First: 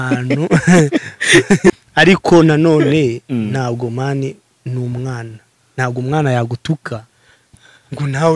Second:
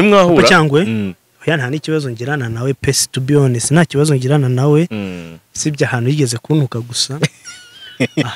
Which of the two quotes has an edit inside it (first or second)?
first